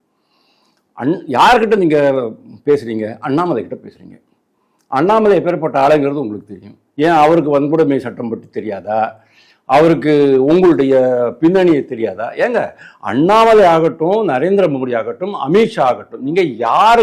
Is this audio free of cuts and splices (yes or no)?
yes